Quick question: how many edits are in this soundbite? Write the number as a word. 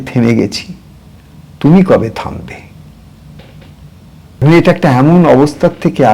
one